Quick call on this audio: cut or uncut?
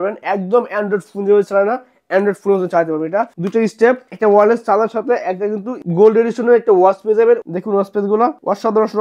cut